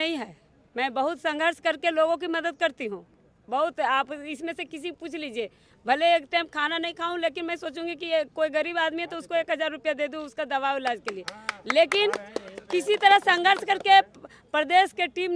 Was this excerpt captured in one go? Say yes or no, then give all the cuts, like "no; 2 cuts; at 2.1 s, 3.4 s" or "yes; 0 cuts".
yes; 0 cuts